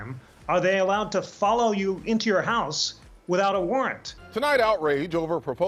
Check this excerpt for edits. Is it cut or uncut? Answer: cut